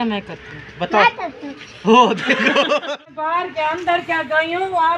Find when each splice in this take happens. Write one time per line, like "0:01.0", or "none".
0:02.9